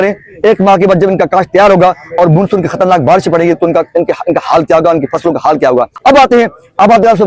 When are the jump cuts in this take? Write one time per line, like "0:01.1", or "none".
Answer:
none